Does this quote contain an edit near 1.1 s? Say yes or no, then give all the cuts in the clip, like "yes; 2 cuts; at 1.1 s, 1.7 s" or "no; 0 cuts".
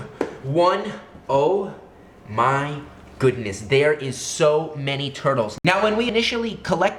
no; 0 cuts